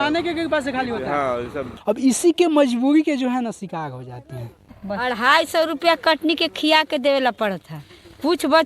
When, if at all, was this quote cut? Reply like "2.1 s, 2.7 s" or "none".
1.7 s, 4.7 s